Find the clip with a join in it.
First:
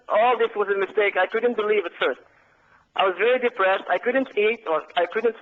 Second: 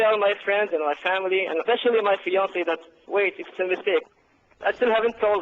second; 2 cuts; at 2.9 s, 4.1 s

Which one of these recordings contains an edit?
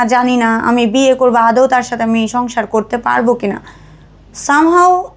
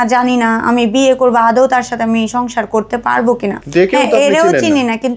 second; 1 cut; at 3.6 s

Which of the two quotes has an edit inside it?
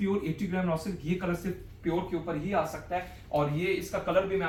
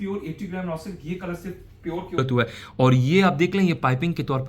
second; 1 cut; at 2.2 s

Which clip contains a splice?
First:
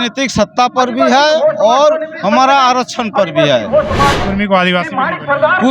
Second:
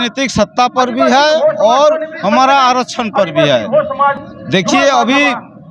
first; 1 cut; at 4.2 s

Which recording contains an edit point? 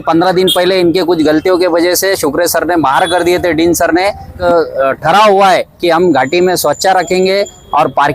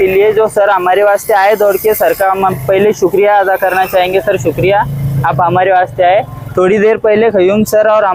first; 1 cut; at 4.4 s

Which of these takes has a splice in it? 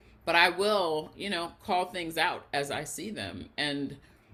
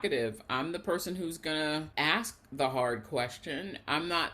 second; 1 cut; at 1.9 s

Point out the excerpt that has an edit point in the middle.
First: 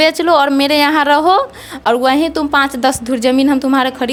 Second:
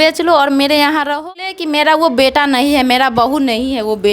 second; 1 cut; at 1.5 s

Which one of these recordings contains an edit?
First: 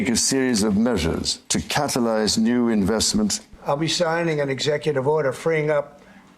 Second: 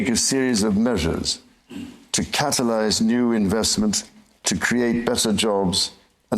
first; 2 cuts; at 1.4 s, 3.5 s

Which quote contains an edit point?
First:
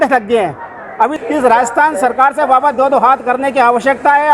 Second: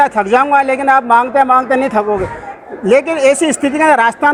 first; 1 cut; at 1.1 s

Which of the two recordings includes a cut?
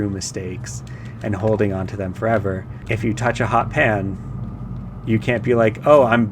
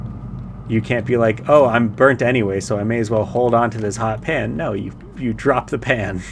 first; 1 cut; at 2.7 s

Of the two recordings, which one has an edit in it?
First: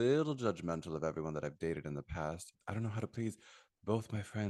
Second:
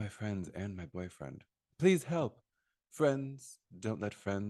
first; 1 cut; at 2.5 s

